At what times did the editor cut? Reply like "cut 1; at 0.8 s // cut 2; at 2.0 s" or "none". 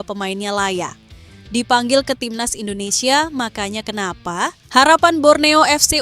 cut 1; at 4.6 s